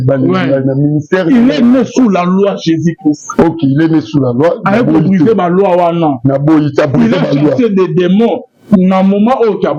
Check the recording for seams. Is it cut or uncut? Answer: uncut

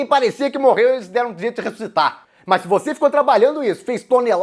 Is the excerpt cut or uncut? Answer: cut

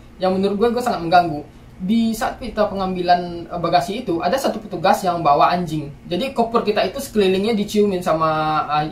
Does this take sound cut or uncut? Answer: uncut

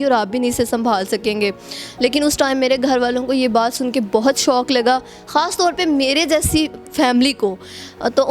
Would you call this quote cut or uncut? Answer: uncut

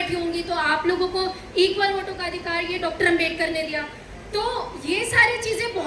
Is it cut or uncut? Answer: uncut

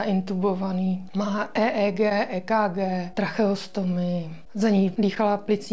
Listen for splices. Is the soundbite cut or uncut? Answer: cut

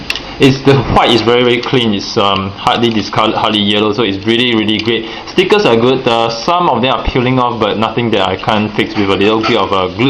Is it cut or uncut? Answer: uncut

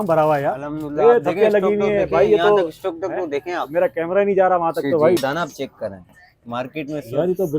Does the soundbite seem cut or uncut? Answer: cut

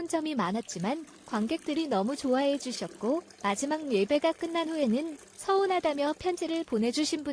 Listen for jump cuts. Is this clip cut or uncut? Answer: uncut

